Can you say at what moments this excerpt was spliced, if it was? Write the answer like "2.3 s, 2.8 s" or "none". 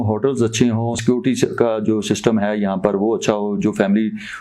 1.0 s